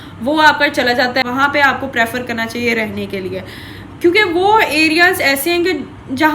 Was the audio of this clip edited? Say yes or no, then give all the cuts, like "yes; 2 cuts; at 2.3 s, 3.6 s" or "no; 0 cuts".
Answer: yes; 1 cut; at 1.2 s